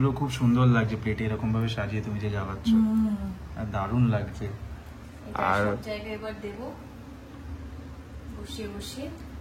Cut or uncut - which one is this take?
uncut